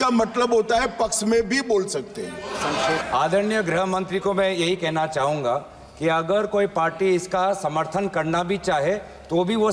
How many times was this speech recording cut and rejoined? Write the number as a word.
one